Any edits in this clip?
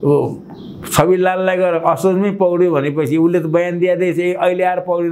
no; 0 cuts

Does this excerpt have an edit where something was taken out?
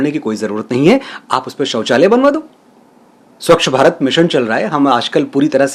no; 0 cuts

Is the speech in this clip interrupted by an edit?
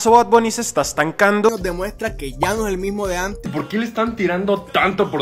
yes; 2 cuts; at 1.5 s, 3.4 s

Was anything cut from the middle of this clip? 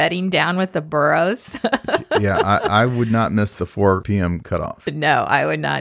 yes; 1 cut; at 4.2 s

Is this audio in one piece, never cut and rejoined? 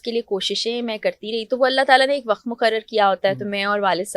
yes; 0 cuts

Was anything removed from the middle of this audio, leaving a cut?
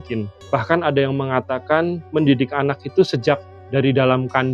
no; 0 cuts

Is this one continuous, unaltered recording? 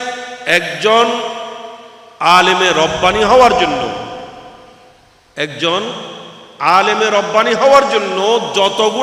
yes; 0 cuts

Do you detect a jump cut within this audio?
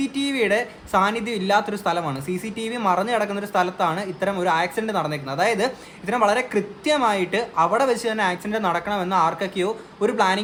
no; 0 cuts

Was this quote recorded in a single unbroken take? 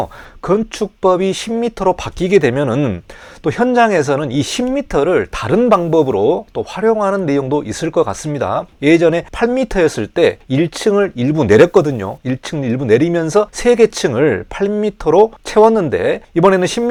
yes; 0 cuts

